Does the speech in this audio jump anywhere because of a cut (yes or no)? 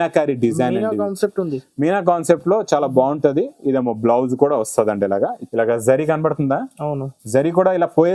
yes